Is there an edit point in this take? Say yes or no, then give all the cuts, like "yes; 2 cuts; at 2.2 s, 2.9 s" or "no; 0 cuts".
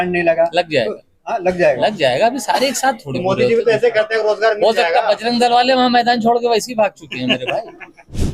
no; 0 cuts